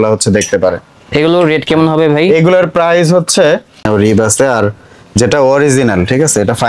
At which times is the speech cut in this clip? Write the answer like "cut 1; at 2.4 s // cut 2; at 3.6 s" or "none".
cut 1; at 3.9 s